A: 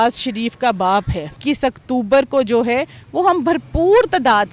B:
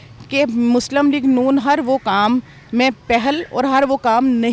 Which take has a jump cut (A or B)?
A